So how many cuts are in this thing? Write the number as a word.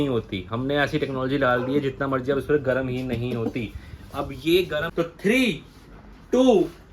one